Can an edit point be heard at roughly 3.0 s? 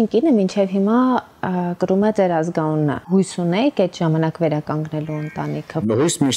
yes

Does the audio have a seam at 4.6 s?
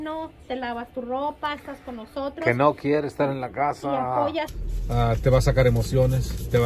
yes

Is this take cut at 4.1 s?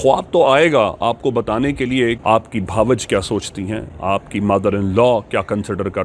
no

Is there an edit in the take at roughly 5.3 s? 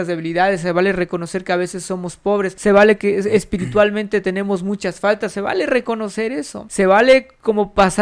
no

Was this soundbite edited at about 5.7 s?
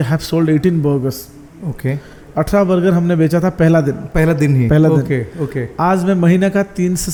no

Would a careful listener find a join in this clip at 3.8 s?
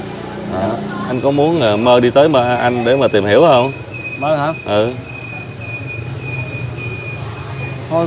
no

